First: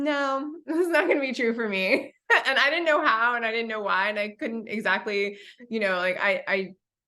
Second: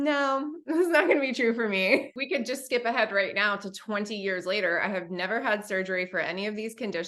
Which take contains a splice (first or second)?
second